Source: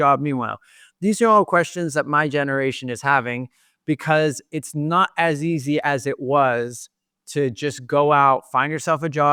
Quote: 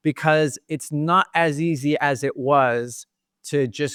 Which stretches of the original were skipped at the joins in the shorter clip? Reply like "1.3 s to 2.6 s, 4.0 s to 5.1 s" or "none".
none

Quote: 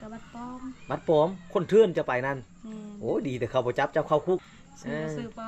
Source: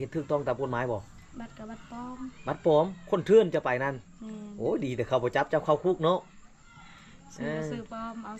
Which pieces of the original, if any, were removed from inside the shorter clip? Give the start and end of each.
6.0 s to 7.0 s

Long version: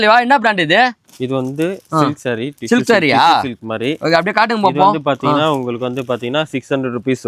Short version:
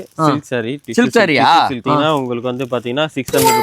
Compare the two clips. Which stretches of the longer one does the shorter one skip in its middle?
3.6 s to 5.2 s

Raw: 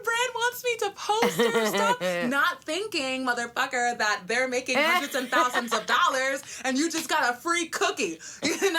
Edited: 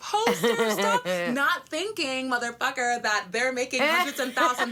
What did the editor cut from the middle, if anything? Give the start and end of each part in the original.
none

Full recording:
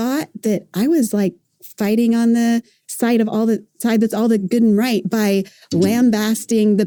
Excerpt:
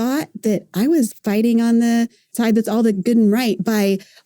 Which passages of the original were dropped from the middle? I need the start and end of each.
1.1 s to 1.6 s, 2.8 s to 3.7 s

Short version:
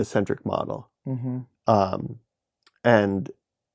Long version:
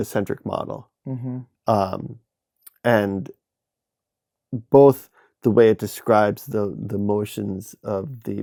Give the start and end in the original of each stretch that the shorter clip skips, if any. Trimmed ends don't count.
none

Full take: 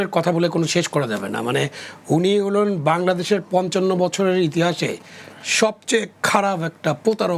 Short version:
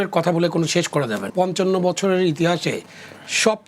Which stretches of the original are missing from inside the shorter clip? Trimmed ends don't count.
1.3 s to 3.5 s

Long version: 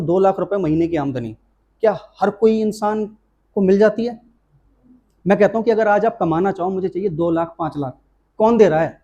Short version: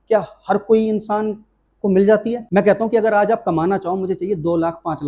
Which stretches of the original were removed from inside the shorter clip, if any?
4.2 s to 5.2 s

